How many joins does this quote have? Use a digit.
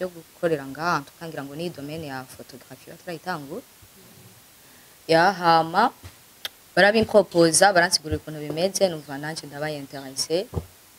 0